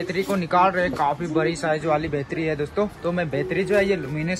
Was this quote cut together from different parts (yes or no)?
no